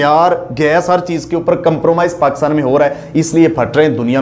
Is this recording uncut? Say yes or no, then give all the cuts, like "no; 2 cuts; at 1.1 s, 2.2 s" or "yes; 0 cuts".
yes; 0 cuts